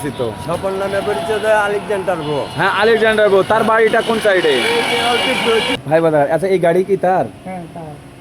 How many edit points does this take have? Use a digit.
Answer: 1